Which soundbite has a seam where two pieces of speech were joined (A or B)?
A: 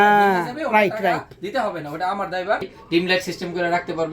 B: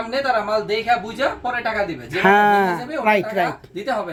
A